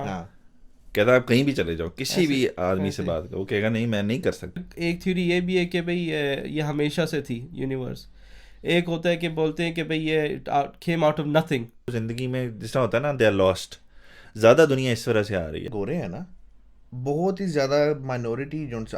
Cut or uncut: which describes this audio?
cut